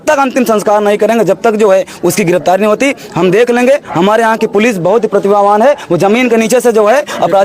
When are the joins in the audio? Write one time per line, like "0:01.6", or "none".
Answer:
none